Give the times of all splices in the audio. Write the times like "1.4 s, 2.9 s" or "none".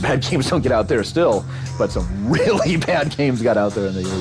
none